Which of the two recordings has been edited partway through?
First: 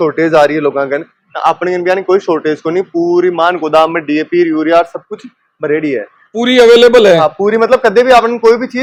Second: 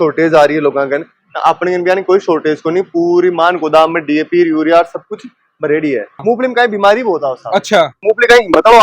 second; 1 cut; at 6.2 s

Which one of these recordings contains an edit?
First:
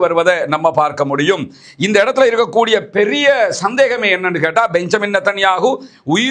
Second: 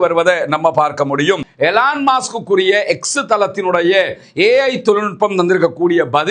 second; 1 cut; at 1.5 s

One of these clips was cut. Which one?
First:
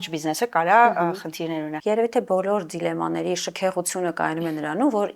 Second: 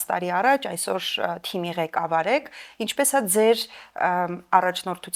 first; 1 cut; at 1.7 s

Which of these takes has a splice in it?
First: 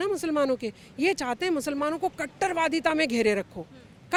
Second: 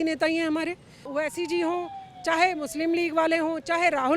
second; 1 cut; at 1.0 s

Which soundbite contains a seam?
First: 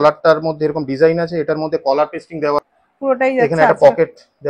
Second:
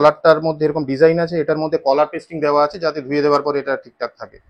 first; 1 cut; at 2.6 s

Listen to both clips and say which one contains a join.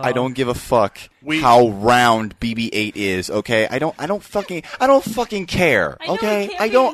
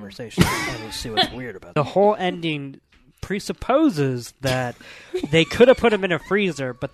second; 1 cut; at 1.7 s

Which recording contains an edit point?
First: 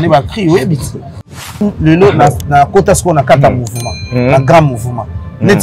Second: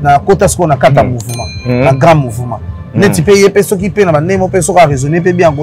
first; 1 cut; at 1.5 s

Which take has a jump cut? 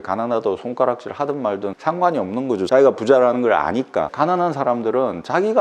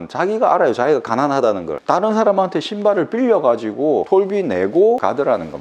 first; 2 cuts; at 2.7 s, 4.1 s

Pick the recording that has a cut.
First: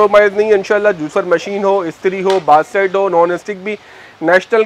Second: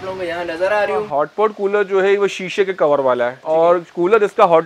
second; 2 cuts; at 1.1 s, 3.4 s

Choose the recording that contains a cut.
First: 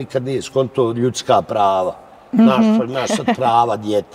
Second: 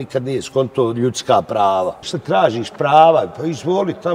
second; 1 cut; at 2.1 s

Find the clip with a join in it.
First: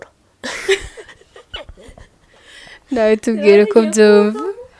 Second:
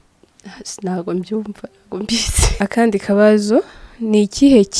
second; 1 cut; at 2.6 s

